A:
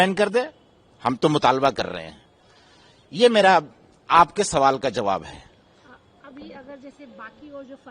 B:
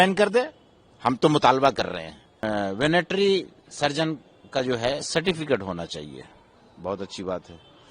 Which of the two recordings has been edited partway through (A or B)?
B